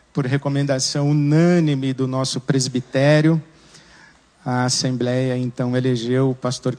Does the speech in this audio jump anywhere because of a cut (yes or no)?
no